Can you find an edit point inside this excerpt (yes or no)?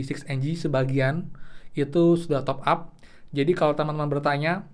no